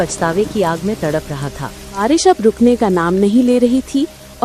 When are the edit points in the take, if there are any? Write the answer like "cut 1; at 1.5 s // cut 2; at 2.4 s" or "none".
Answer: cut 1; at 2.0 s